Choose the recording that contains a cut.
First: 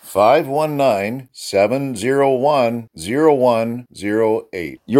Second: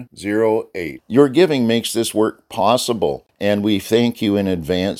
second; 1 cut; at 3.3 s

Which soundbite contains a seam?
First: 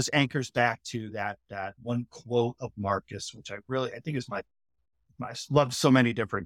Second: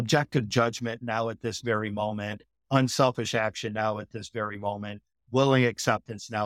first; 1 cut; at 1.7 s

